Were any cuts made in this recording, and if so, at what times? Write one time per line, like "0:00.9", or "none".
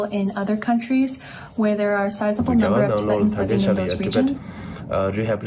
0:04.5